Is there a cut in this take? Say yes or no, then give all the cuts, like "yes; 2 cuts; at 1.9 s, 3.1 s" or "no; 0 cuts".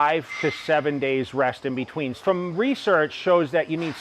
yes; 1 cut; at 2.2 s